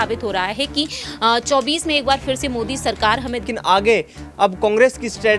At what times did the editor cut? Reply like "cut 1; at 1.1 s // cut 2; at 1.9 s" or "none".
cut 1; at 3.4 s